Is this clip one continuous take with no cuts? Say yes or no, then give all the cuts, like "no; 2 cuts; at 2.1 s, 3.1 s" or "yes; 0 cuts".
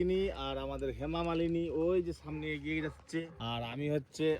no; 1 cut; at 3.3 s